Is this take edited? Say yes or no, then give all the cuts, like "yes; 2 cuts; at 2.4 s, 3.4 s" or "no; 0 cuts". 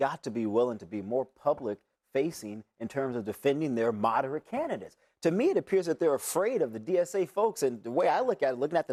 no; 0 cuts